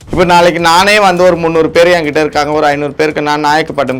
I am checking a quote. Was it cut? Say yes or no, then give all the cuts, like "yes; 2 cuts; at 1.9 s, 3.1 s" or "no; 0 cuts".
no; 0 cuts